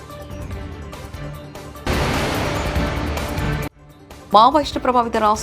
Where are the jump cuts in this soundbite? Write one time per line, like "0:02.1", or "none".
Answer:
0:03.6